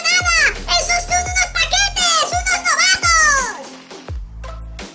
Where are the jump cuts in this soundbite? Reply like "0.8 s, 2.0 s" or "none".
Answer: 3.6 s